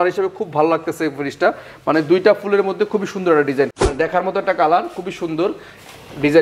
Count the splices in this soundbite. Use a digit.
1